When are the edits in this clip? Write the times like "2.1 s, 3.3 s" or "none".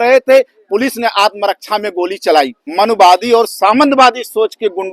2.6 s

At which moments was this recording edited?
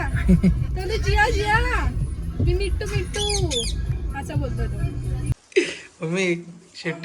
5.4 s

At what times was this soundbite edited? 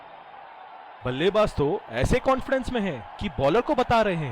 1.0 s

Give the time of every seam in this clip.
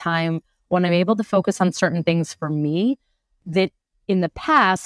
none

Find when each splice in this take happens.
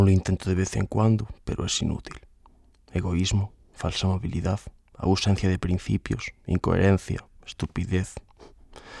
1.3 s

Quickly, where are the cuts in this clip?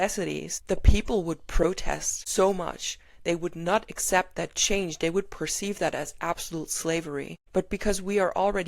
2.1 s, 7.4 s

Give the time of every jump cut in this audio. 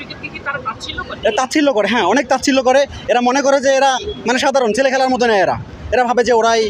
none

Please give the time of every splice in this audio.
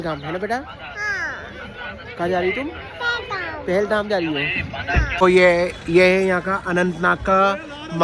none

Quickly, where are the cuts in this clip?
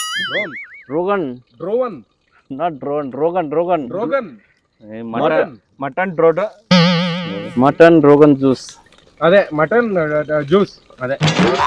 none

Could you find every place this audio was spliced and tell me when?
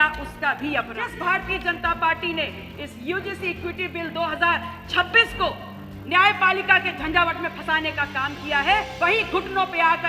0.9 s, 8.9 s

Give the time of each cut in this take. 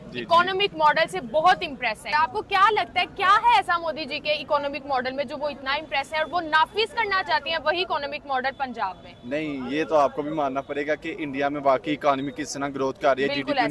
none

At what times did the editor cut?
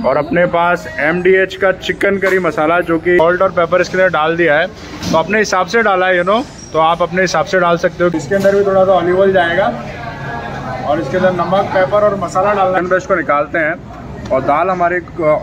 3.2 s, 8.1 s, 12.8 s

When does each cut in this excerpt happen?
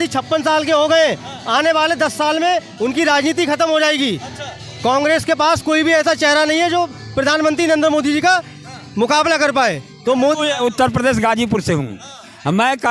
10.4 s

